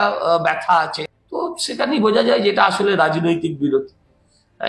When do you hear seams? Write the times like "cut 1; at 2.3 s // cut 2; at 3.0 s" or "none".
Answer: cut 1; at 1.0 s